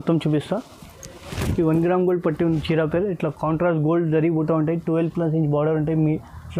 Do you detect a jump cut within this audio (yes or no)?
no